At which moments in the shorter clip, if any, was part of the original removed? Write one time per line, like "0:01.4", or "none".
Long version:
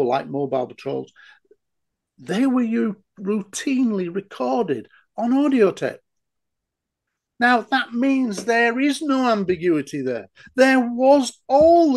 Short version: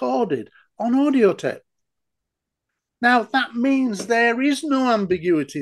none